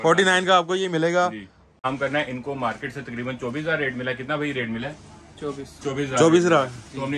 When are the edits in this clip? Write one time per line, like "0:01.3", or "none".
0:01.8